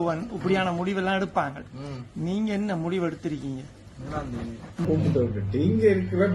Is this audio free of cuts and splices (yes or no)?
no